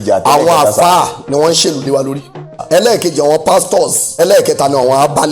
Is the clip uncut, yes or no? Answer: no